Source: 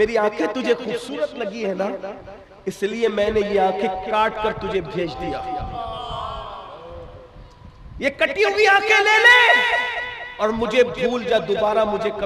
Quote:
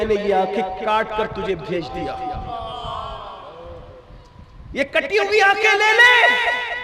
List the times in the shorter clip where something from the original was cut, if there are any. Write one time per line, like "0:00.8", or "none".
none